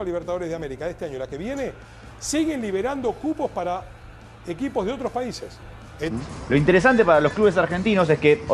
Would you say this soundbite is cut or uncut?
cut